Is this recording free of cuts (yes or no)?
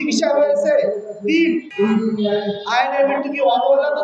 no